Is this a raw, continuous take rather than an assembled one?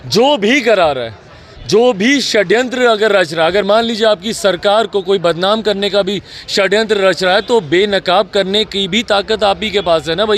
yes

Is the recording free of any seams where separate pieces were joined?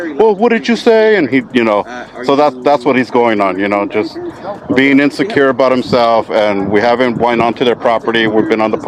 yes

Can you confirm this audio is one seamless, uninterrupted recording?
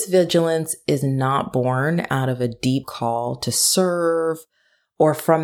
yes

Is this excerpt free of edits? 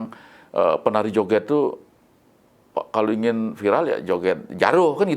yes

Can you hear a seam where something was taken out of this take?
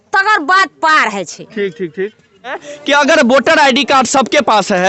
yes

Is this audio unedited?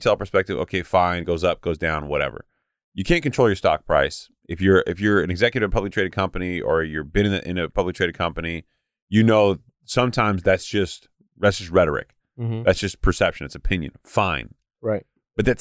yes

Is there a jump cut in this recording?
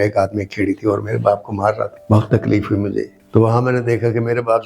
yes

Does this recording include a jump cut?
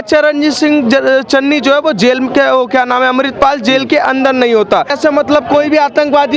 yes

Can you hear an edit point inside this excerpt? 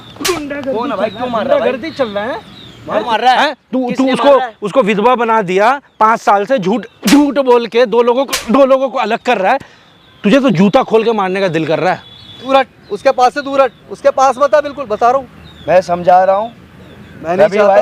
yes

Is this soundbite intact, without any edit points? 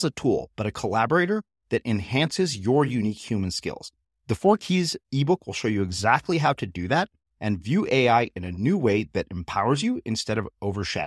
yes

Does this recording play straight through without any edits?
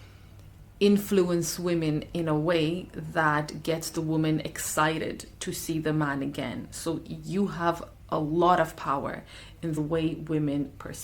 no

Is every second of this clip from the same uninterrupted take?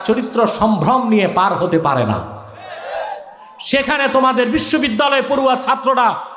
yes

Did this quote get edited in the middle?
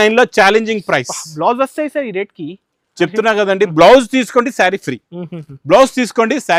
no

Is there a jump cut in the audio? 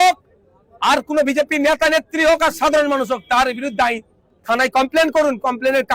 no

